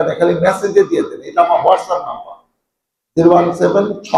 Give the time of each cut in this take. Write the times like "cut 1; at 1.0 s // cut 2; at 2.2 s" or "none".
none